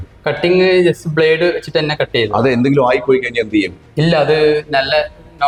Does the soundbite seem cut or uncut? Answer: uncut